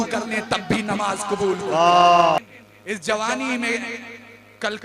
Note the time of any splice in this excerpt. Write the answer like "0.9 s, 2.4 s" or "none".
2.4 s